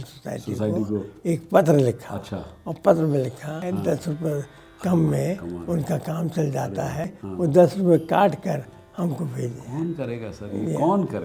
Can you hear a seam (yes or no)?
yes